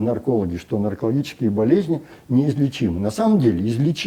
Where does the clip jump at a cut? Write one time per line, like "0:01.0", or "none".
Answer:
none